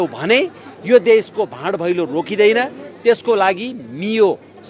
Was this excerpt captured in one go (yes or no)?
yes